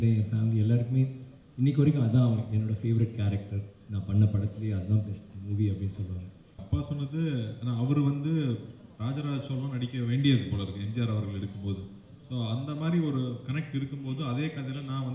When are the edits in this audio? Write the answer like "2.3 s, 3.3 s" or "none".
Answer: 6.6 s